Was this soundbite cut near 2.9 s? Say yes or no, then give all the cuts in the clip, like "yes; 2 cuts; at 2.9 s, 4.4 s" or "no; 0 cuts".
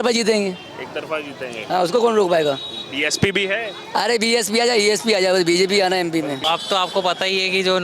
no; 1 cut; at 6.4 s